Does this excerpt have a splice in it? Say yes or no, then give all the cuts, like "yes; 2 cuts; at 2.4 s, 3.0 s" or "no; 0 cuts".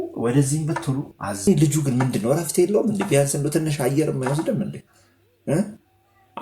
yes; 1 cut; at 1.5 s